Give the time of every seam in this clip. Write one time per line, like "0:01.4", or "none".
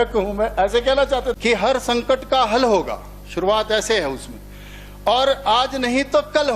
0:01.4